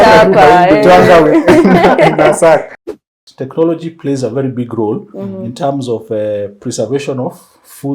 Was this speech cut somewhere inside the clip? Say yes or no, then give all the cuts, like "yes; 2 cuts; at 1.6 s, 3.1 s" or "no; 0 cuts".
yes; 1 cut; at 2.8 s